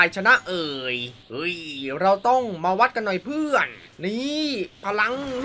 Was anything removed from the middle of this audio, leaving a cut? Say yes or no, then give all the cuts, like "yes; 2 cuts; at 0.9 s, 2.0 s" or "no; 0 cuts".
no; 0 cuts